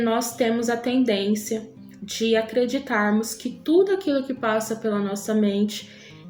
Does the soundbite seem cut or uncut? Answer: uncut